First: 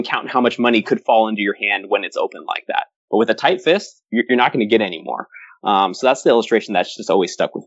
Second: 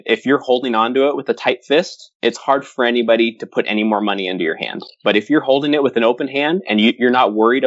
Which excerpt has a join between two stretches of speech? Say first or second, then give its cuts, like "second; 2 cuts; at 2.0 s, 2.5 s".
first; 1 cut; at 4.0 s